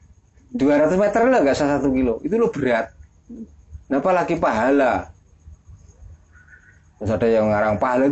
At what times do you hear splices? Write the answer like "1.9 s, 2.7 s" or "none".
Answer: none